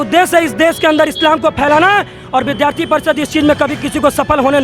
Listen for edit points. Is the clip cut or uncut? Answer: cut